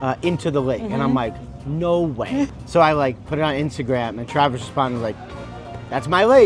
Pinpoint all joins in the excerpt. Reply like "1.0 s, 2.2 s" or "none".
2.5 s